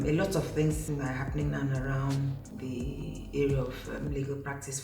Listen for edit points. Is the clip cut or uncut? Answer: cut